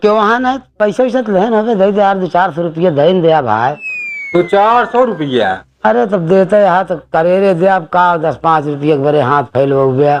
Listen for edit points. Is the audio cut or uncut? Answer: uncut